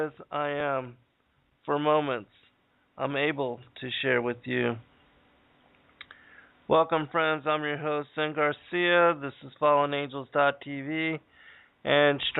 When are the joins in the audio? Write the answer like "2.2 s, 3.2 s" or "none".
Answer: 9.6 s